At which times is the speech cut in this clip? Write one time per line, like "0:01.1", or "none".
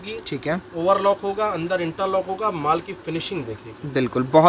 none